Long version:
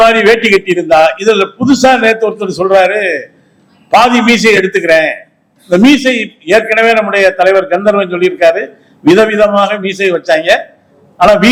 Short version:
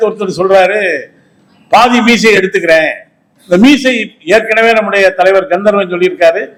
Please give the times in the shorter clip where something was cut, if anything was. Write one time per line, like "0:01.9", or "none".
none